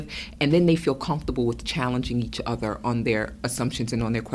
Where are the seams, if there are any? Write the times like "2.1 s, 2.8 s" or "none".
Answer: none